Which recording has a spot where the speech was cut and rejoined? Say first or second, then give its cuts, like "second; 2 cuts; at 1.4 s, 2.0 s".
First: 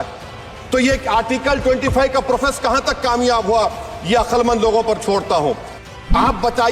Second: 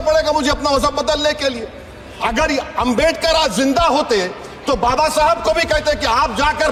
first; 1 cut; at 5.7 s